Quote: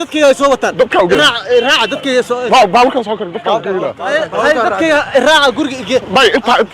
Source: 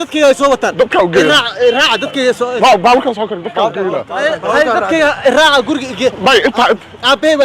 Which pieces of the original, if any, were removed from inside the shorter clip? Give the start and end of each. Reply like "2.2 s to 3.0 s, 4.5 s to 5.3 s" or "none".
1.1 s to 1.2 s